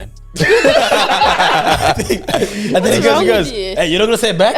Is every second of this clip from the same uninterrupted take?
yes; 0 cuts

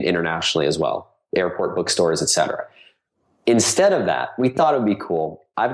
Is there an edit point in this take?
no; 0 cuts

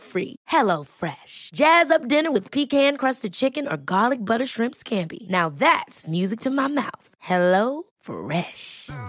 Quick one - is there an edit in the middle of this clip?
no; 0 cuts

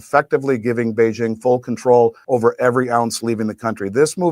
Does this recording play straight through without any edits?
no; 1 cut; at 2.2 s

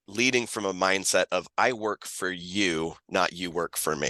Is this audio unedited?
yes; 0 cuts

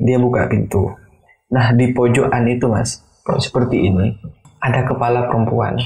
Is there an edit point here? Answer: yes; 1 cut; at 4.5 s

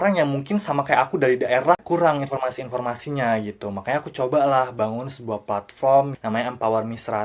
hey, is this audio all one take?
no; 2 cuts; at 1.8 s, 6.2 s

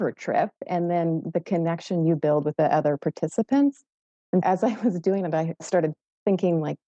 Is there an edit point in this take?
yes; 3 cuts; at 2.5 s, 4.4 s, 5.5 s

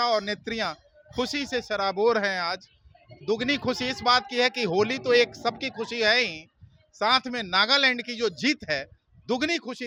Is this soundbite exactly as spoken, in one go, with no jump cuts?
yes; 0 cuts

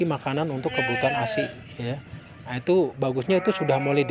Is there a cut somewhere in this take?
no; 0 cuts

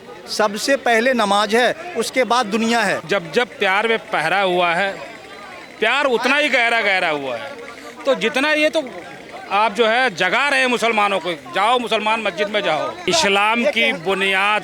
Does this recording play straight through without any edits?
no; 2 cuts; at 3.1 s, 13.1 s

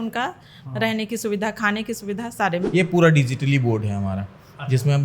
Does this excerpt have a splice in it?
yes; 1 cut; at 2.7 s

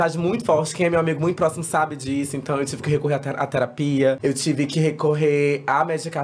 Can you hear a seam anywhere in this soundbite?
yes; 1 cut; at 4.2 s

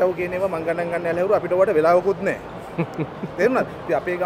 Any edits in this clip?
no; 0 cuts

